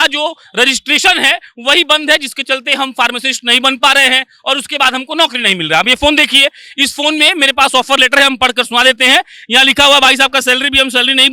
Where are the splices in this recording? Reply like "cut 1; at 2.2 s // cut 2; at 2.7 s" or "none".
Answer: none